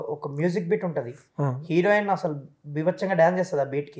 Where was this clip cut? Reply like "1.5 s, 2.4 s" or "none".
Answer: none